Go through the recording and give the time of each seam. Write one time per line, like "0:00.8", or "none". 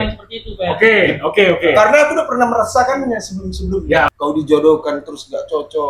0:04.1